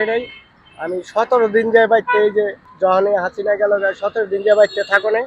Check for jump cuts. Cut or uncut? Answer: uncut